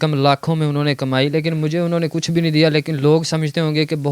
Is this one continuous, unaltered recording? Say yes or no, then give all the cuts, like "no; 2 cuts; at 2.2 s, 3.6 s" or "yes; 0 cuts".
yes; 0 cuts